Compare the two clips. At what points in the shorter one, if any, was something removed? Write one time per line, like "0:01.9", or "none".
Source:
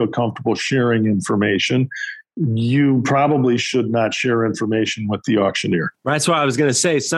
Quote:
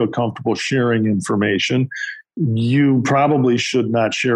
none